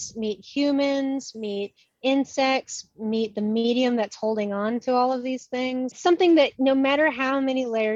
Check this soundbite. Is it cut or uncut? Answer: cut